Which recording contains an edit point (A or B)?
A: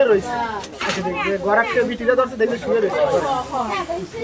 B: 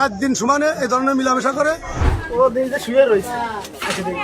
B